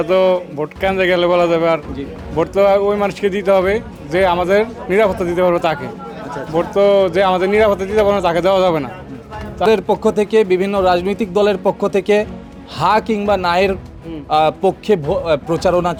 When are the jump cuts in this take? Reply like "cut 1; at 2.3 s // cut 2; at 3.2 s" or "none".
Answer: none